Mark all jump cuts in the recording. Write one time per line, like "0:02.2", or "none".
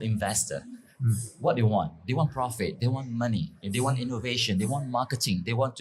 none